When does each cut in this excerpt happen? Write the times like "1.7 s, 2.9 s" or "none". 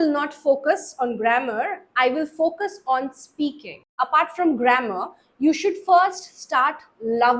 3.8 s